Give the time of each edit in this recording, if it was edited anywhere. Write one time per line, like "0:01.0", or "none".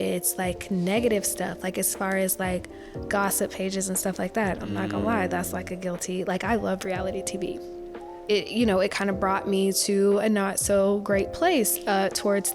0:08.2